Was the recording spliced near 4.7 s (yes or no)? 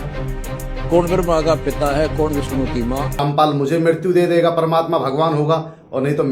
no